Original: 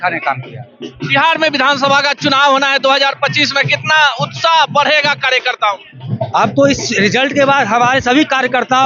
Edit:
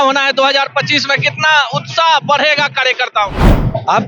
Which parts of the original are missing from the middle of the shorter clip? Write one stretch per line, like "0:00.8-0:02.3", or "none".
none

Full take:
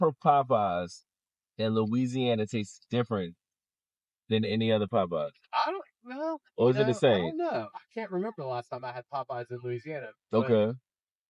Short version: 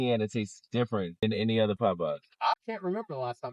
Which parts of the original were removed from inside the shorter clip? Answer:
0:03.4-0:04.3
0:05.7-0:07.9

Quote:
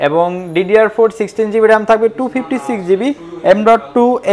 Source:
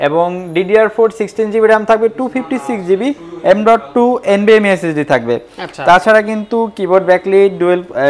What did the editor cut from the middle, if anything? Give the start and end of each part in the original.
none

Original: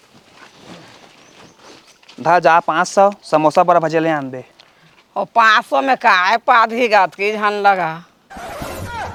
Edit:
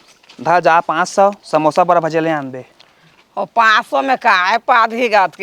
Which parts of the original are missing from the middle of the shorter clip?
none

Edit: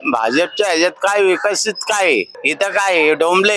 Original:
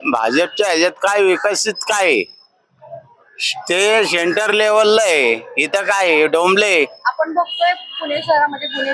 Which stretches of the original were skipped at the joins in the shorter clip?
0:02.4-0:05.5

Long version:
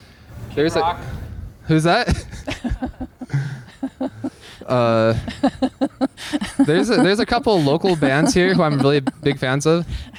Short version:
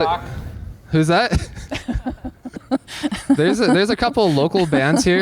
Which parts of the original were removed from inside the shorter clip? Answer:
0:03.4-0:05.9

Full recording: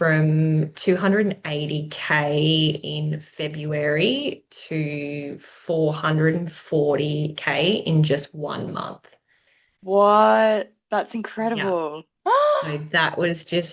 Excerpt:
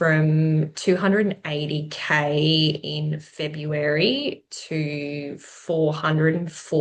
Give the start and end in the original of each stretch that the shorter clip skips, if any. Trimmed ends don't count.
none

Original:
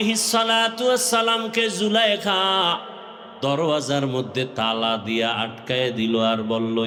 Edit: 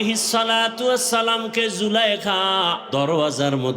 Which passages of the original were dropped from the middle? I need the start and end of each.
0:02.8-0:03.3

